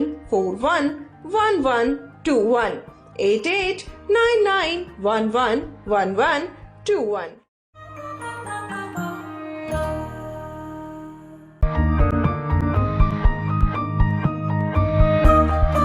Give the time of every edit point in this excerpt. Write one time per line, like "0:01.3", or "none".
0:07.8
0:11.5

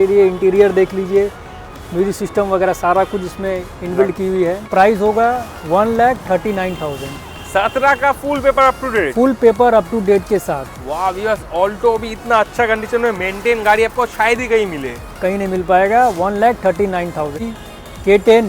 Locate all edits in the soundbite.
0:04.7
0:17.6

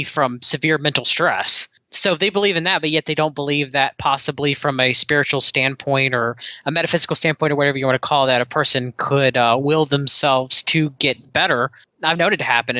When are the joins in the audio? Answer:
0:01.8
0:11.8

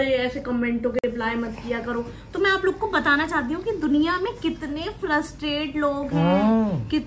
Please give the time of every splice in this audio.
none

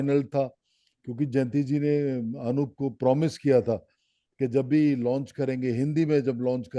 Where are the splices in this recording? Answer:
none

